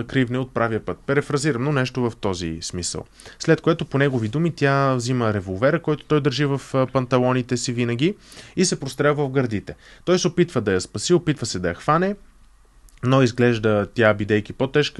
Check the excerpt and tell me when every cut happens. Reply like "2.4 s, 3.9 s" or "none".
none